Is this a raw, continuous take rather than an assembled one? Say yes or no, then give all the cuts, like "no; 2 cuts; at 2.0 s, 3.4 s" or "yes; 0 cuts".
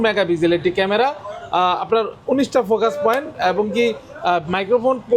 yes; 0 cuts